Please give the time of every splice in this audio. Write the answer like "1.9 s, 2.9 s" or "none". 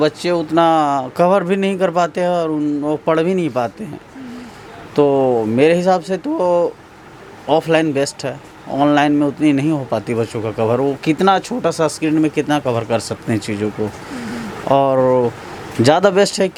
none